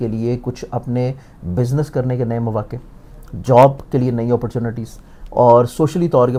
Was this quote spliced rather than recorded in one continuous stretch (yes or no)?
no